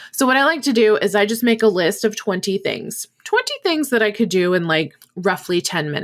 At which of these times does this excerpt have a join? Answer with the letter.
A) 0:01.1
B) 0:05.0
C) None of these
B